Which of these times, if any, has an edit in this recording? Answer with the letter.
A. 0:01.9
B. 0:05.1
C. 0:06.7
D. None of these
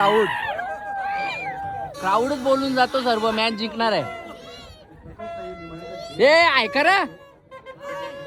D